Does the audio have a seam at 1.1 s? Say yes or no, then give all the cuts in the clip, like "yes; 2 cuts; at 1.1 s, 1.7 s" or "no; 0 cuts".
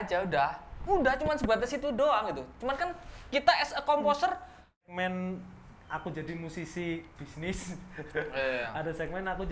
no; 1 cut; at 4.9 s